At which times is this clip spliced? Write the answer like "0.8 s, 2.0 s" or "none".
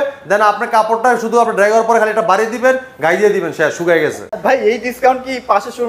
4.3 s